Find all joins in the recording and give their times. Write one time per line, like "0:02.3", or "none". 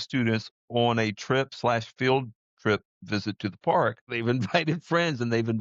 0:04.1